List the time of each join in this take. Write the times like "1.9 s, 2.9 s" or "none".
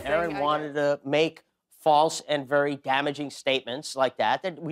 none